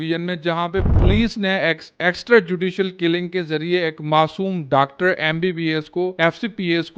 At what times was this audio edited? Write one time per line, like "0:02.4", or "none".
none